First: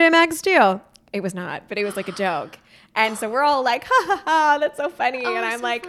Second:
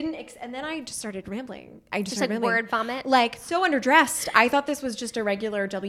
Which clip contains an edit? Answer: second; 2 cuts; at 1.9 s, 3.4 s

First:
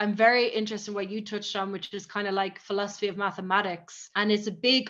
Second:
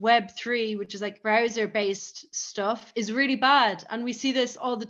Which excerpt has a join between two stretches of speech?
second; 2 cuts; at 1.1 s, 2.6 s

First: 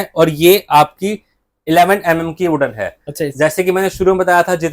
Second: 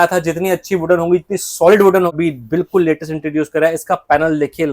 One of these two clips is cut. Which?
second; 1 cut; at 2.1 s

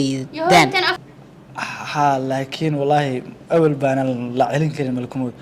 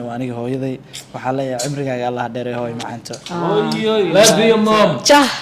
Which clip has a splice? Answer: first; 1 cut; at 0.9 s

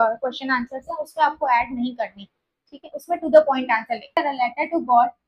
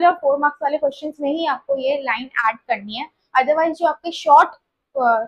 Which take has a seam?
first; 1 cut; at 4.2 s

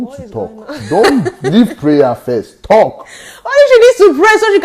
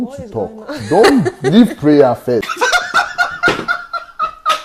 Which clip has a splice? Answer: first; 1 cut; at 2.5 s

